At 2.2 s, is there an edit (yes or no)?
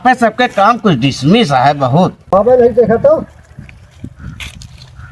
yes